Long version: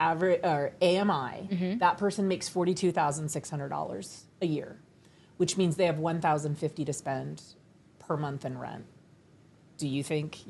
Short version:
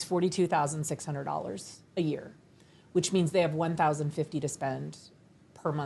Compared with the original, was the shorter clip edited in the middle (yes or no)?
no